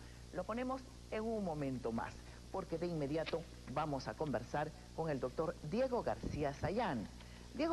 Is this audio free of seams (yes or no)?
no